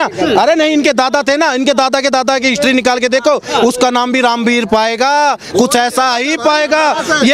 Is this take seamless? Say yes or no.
yes